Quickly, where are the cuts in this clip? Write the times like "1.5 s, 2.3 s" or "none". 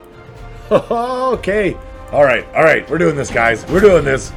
none